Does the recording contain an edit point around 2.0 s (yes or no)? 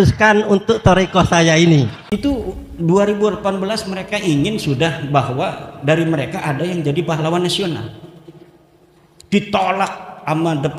yes